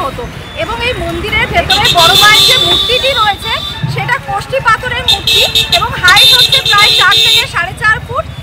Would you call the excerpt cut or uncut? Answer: uncut